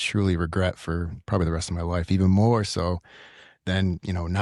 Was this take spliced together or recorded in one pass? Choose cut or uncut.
uncut